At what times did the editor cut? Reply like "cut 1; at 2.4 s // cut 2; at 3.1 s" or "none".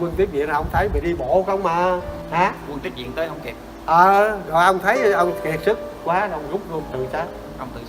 cut 1; at 2.1 s